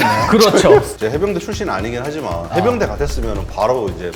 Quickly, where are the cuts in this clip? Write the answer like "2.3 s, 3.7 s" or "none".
1.0 s